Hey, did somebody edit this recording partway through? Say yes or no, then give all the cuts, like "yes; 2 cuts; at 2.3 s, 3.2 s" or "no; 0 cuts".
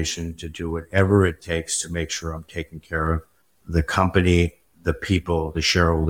no; 0 cuts